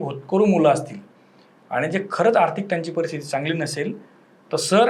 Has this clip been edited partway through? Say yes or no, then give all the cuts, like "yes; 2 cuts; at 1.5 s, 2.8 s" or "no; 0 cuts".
no; 0 cuts